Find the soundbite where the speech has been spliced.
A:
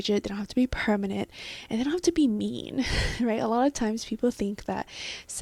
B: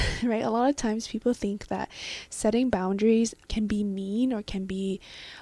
B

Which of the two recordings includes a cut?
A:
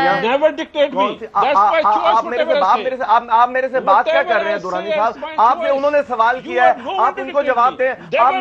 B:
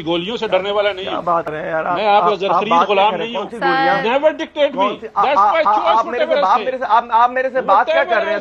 B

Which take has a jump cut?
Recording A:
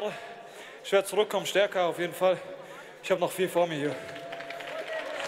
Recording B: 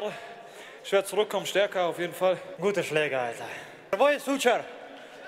B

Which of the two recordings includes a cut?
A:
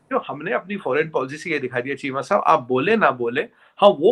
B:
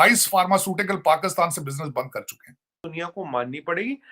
B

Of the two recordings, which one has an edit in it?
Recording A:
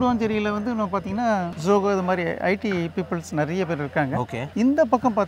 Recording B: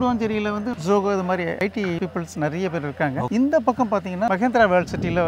B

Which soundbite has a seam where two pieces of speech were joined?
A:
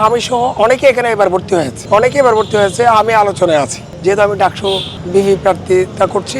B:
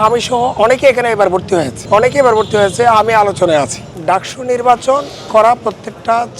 B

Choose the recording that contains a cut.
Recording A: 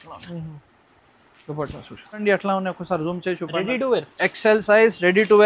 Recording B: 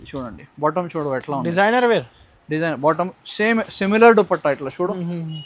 A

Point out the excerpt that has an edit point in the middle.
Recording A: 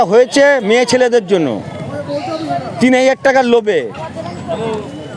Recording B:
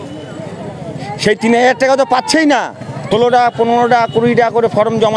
B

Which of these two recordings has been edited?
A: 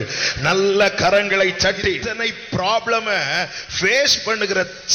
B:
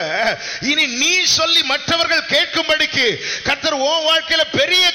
A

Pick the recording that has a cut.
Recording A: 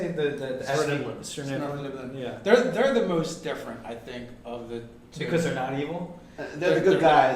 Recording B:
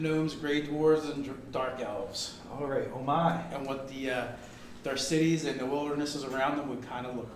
A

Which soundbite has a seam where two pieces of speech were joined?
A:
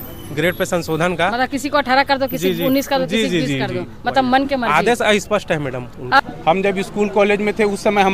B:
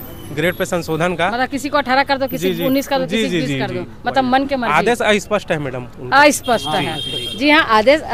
A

